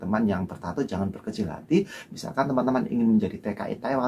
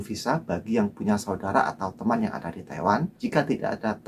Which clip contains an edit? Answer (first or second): second